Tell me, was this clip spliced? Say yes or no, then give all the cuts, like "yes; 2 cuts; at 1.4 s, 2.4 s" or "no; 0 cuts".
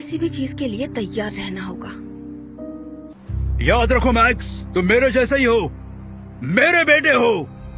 yes; 1 cut; at 3.1 s